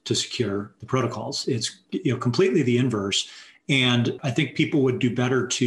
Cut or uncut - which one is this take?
cut